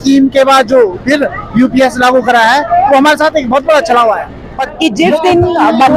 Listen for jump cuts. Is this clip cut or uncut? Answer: cut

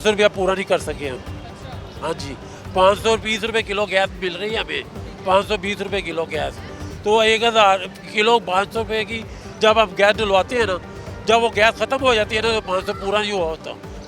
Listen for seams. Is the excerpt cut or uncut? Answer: uncut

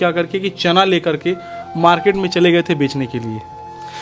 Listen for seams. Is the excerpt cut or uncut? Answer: uncut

